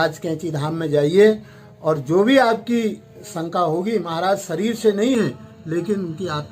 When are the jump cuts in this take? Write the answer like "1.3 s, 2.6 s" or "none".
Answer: none